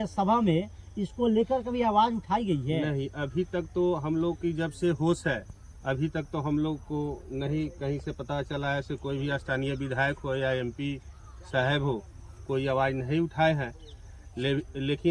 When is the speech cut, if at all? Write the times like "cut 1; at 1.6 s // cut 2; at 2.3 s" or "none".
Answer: none